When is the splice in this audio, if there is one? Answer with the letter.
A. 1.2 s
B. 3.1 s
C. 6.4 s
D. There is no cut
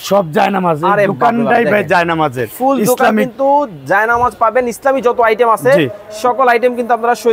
D